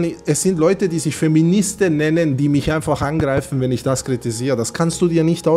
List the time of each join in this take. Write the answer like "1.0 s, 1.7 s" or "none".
none